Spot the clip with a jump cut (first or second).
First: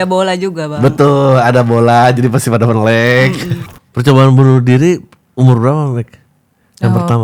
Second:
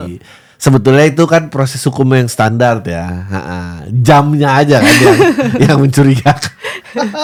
first